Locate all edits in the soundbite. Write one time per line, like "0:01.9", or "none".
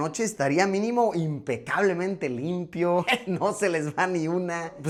none